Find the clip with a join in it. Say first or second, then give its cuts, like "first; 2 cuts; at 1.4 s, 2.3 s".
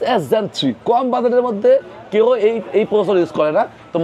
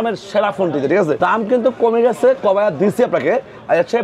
second; 1 cut; at 1.2 s